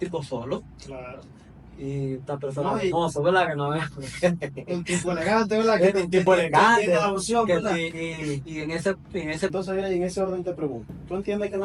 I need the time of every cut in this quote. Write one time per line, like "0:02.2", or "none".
0:09.5